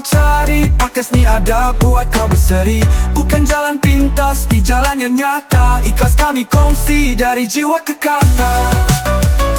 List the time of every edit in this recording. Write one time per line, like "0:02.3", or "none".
none